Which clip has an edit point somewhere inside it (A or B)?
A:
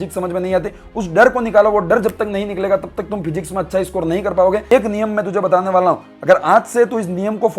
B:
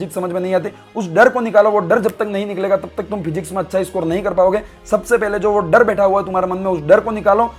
A